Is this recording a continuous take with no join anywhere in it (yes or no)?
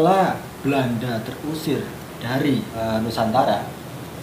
no